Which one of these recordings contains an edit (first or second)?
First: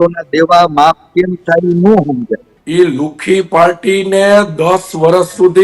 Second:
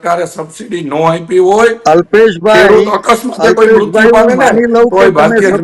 first